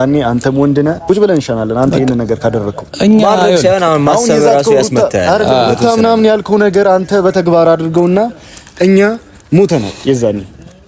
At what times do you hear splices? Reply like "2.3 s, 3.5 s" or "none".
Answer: 1.0 s